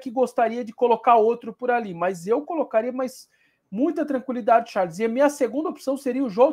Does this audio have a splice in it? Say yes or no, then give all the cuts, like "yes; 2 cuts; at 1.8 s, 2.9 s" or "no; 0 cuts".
no; 0 cuts